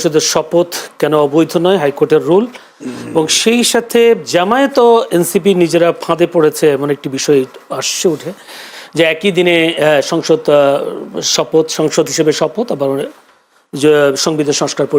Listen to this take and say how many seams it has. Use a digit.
0